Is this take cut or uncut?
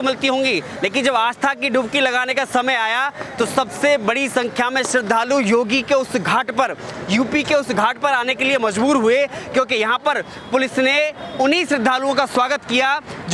uncut